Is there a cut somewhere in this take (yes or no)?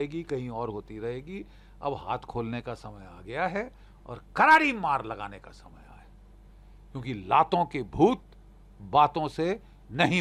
no